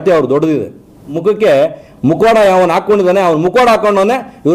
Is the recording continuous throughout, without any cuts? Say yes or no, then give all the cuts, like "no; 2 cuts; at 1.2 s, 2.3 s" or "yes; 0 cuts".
no; 1 cut; at 1.2 s